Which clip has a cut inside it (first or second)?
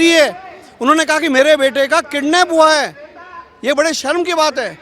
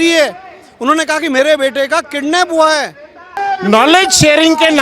second